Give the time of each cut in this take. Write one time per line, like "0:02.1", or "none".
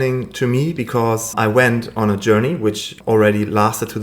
0:01.3
0:02.9